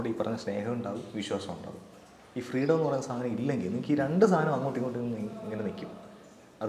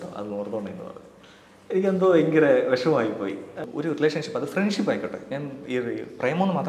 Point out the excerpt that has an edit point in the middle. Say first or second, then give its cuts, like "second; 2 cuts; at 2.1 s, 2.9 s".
second; 1 cut; at 3.6 s